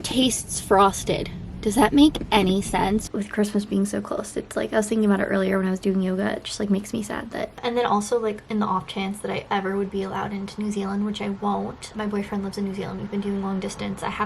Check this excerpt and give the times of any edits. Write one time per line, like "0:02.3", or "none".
0:03.1
0:07.6
0:11.9